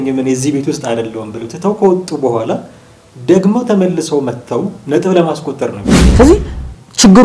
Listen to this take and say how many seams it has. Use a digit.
1